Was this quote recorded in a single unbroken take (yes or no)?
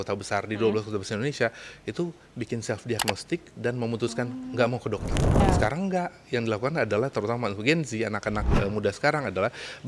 no